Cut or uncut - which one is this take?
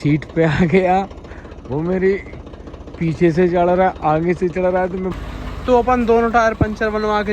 cut